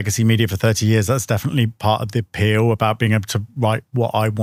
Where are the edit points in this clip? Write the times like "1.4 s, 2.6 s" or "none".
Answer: none